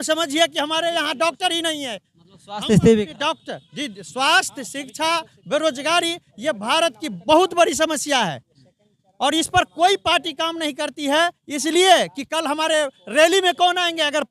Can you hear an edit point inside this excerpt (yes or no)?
no